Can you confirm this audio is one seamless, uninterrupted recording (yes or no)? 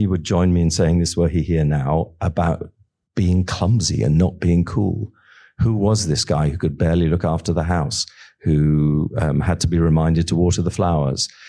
yes